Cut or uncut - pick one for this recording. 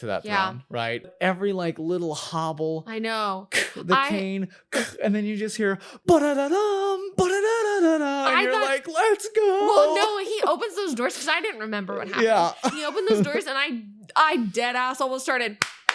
cut